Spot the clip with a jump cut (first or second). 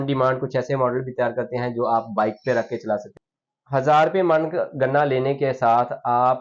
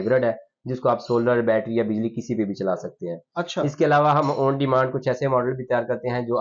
first